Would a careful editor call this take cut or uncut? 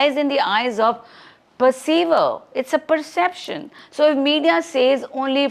uncut